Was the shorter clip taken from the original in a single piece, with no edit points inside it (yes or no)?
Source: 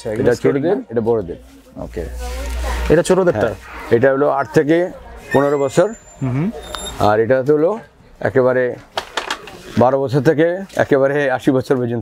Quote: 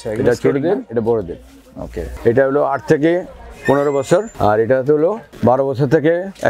no